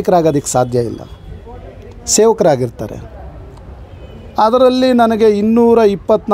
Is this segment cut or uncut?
uncut